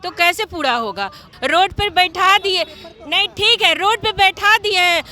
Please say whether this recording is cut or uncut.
cut